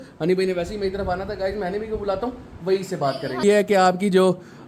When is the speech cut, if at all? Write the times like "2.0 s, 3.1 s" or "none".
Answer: 3.4 s